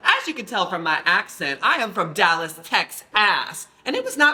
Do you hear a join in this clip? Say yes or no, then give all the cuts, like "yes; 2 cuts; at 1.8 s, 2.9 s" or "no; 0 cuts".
no; 0 cuts